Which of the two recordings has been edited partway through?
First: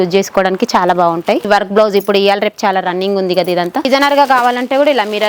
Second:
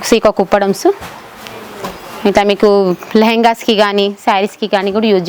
first; 2 cuts; at 1.5 s, 3.9 s

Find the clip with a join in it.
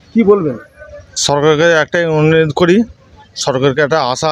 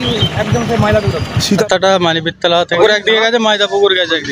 second; 2 cuts; at 1.6 s, 2.8 s

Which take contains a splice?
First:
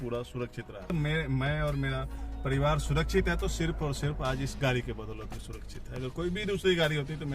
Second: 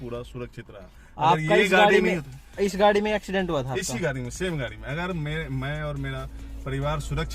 first; 1 cut; at 0.9 s

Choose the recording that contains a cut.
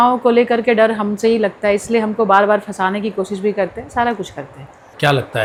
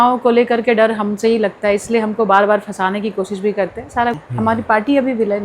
second; 1 cut; at 4.2 s

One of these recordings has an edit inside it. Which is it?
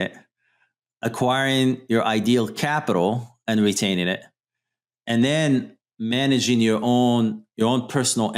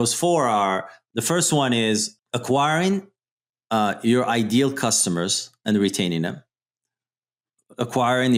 first; 1 cut; at 7.4 s

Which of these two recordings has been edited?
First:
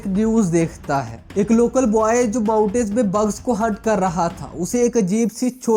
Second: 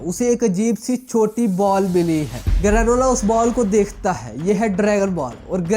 second; 1 cut; at 2.4 s

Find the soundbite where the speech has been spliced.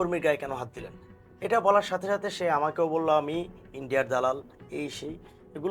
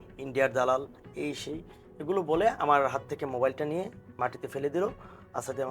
second; 1 cut; at 4.1 s

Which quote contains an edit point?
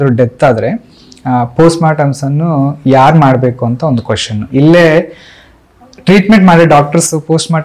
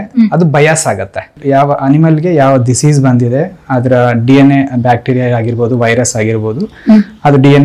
second; 1 cut; at 1.3 s

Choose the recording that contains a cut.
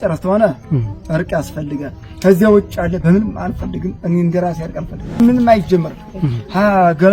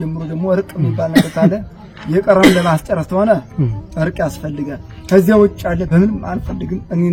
first; 1 cut; at 5.2 s

